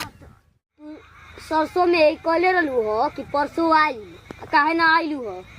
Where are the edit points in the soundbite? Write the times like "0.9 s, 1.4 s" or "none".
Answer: 0.9 s